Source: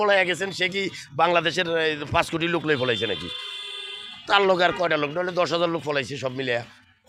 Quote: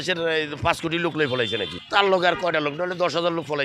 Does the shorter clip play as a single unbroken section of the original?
no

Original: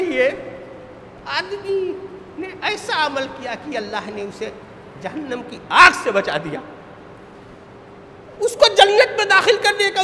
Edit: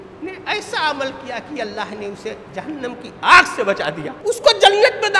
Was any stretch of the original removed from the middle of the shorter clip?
yes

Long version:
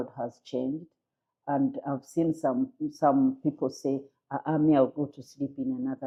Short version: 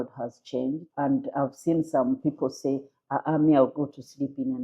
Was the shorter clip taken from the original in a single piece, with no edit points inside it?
no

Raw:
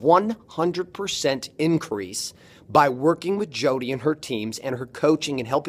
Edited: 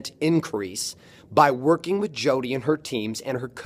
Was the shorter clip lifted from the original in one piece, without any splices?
yes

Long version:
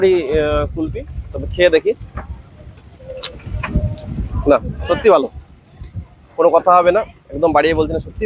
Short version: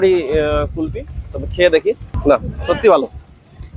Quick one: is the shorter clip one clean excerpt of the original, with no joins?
no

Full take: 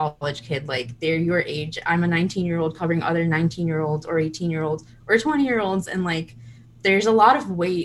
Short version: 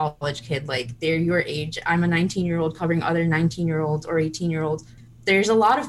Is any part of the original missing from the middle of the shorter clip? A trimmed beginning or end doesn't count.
yes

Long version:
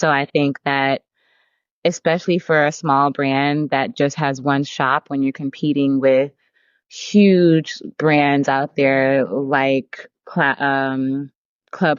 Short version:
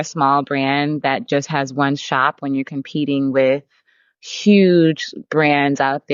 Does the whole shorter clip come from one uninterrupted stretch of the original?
yes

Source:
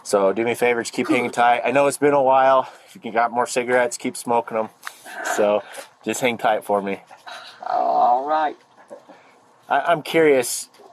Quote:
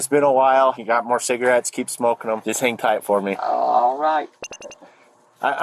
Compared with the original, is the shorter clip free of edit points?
no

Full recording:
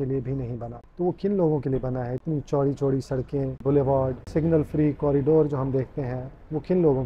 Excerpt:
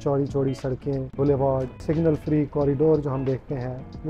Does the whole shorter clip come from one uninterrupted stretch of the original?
yes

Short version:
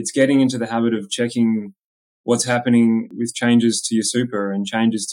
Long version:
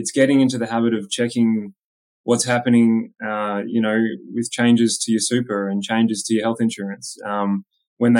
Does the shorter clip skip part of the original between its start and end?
yes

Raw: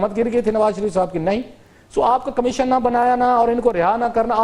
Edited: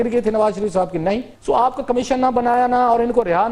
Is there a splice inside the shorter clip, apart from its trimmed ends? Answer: yes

